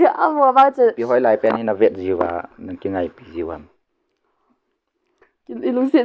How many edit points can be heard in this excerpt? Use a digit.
1